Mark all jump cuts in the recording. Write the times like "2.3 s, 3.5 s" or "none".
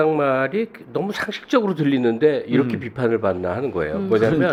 none